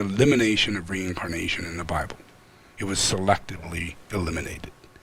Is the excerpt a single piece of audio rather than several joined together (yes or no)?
yes